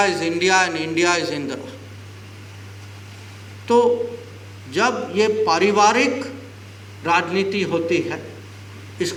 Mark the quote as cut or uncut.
uncut